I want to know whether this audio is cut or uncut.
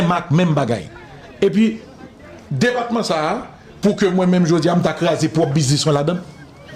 uncut